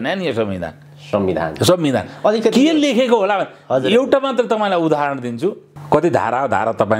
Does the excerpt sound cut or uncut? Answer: cut